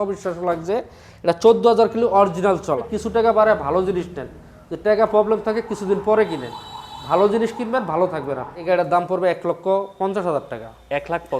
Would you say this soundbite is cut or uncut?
cut